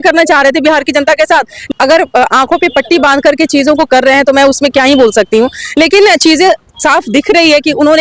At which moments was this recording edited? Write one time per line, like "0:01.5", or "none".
0:01.7